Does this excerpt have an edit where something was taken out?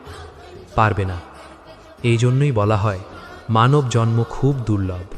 no; 0 cuts

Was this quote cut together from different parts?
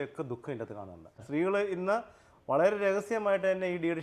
yes; 1 cut; at 1.2 s

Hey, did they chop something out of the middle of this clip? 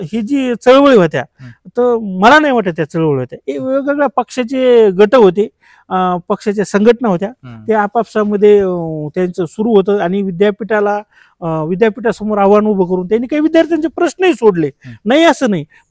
no; 0 cuts

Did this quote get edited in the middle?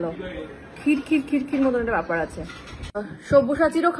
yes; 1 cut; at 3.0 s

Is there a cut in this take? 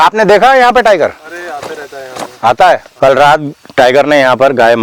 yes; 1 cut; at 2.9 s

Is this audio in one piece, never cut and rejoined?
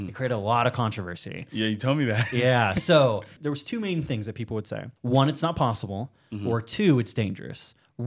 no; 2 cuts; at 3.3 s, 4.9 s

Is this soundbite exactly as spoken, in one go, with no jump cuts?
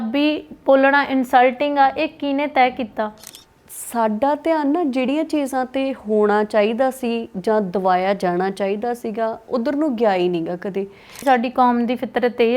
no; 2 cuts; at 3.2 s, 11.2 s

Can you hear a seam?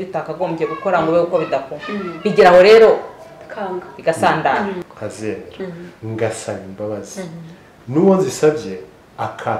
yes; 1 cut; at 4.8 s

